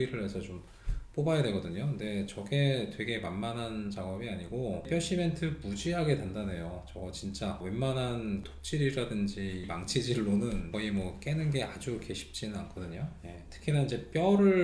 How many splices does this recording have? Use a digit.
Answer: 0